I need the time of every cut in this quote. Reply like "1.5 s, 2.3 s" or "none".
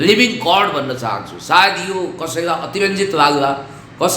none

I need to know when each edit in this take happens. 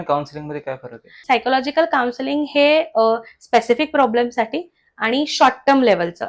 1.1 s

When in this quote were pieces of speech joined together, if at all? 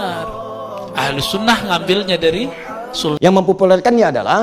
3.2 s

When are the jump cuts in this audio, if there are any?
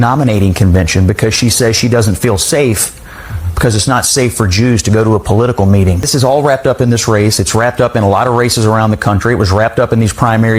6.1 s

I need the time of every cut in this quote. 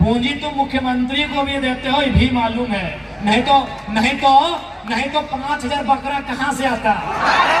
none

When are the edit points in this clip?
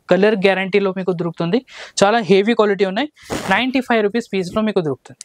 none

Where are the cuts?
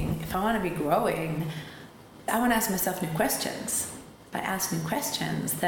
2.2 s

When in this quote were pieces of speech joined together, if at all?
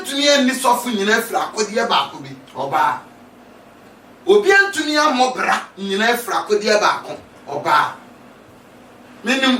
none

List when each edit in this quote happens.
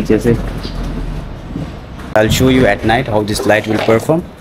2.1 s

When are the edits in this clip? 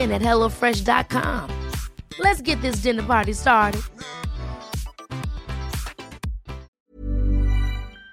6.7 s

